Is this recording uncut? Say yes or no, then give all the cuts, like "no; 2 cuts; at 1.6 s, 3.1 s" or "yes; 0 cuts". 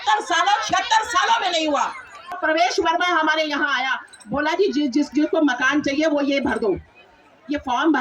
no; 1 cut; at 2.4 s